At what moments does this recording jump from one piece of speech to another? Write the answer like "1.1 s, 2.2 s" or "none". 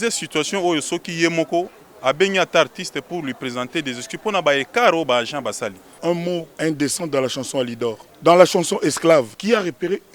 6.2 s, 8.1 s, 9.3 s